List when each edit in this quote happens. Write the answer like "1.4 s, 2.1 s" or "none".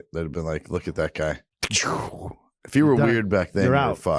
1.5 s